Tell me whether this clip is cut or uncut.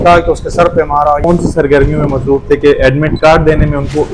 cut